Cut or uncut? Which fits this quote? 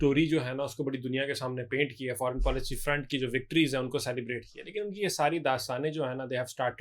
uncut